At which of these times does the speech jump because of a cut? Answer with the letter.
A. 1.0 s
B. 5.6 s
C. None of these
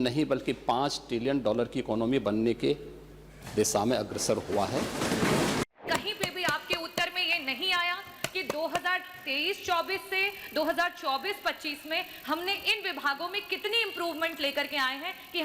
B